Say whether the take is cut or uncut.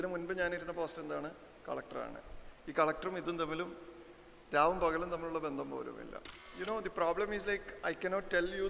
cut